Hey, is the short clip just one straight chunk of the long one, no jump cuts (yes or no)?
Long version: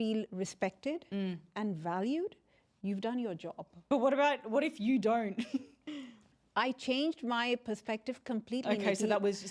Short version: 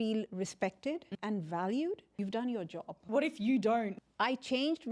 no